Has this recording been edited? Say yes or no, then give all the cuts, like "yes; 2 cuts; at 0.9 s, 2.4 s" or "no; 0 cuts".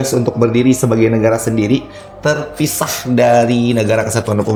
no; 0 cuts